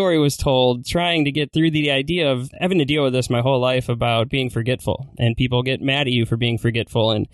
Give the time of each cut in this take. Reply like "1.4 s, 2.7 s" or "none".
1.5 s, 2.5 s